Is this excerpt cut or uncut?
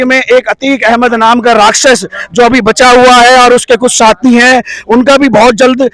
uncut